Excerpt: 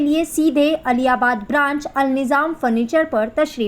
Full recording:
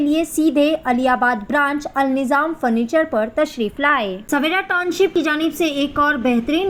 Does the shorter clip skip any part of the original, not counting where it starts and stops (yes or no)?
no